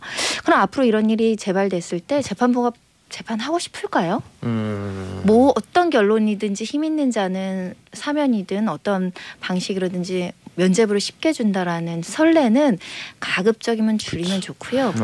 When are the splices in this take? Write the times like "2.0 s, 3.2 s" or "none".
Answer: none